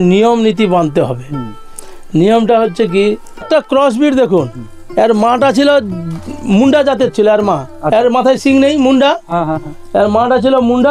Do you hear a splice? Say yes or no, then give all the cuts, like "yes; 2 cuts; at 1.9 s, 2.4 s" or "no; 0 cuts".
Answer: yes; 1 cut; at 3.4 s